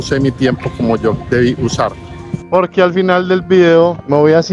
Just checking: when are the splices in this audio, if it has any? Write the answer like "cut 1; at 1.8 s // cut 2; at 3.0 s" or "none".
cut 1; at 2.5 s